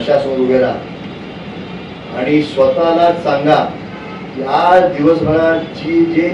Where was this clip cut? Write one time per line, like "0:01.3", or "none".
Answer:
none